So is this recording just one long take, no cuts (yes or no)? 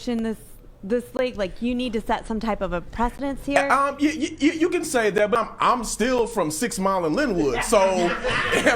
no